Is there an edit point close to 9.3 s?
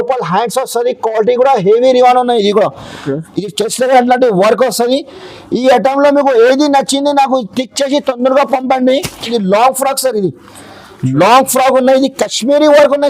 yes; 1 cut; at 9.3 s

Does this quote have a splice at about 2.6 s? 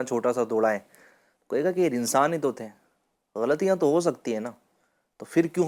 no; 0 cuts

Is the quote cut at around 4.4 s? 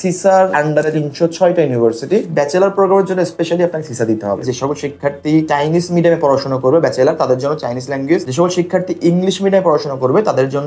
yes; 3 cuts; at 0.9 s, 2.3 s, 4.4 s

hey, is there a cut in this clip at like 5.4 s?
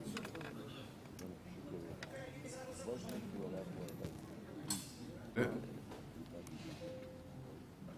yes; 1 cut; at 5.4 s

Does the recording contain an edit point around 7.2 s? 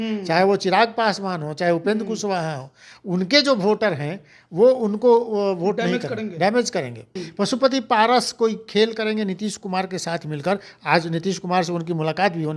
yes; 1 cut; at 7.2 s

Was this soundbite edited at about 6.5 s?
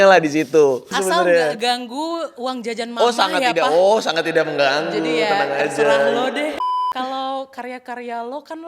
yes; 2 cuts; at 0.9 s, 6.5 s

